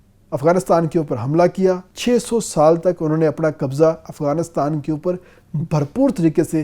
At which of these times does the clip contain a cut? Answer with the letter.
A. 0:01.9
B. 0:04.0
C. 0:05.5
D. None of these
A